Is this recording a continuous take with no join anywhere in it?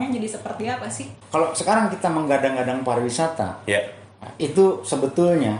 no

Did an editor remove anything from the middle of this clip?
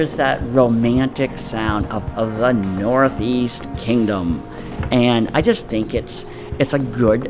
no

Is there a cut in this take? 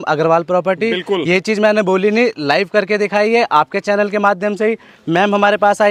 no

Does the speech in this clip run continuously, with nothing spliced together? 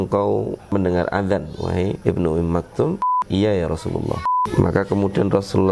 no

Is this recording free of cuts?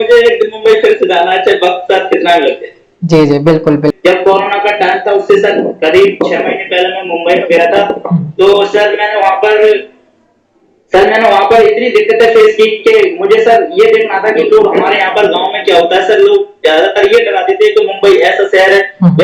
no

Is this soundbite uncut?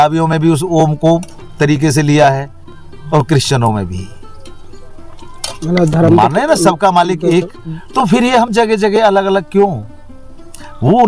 yes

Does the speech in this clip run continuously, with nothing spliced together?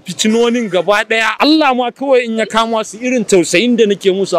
no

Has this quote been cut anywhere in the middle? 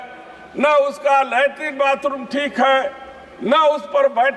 no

